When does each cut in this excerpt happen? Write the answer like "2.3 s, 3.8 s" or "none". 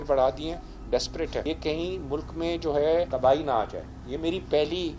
1.4 s, 3.1 s